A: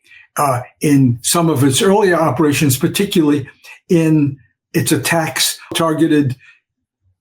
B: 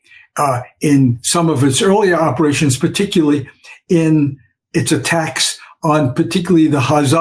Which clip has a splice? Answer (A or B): A